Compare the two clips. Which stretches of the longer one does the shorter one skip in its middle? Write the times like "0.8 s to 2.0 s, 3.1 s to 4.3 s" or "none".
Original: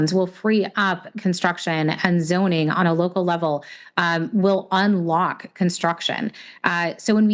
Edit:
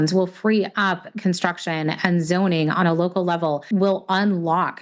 3.6 s to 4.3 s